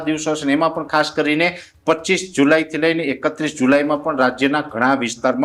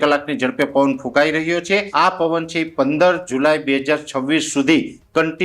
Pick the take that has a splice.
second; 1 cut; at 1.9 s

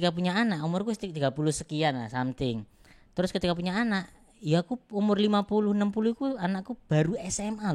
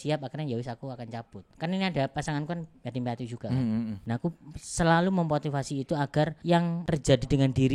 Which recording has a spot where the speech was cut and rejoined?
second; 3 cuts; at 1.5 s, 4.0 s, 6.6 s

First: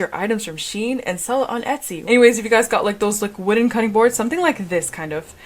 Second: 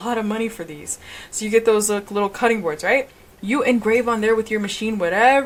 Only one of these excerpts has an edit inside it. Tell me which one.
first; 1 cut; at 1.9 s

